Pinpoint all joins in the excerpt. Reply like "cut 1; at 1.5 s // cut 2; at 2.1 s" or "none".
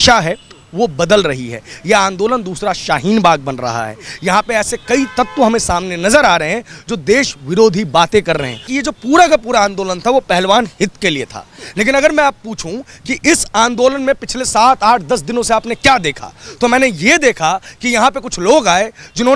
cut 1; at 8.7 s